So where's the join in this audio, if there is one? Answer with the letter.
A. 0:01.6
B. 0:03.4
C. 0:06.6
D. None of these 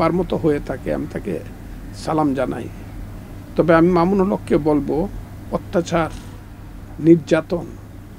D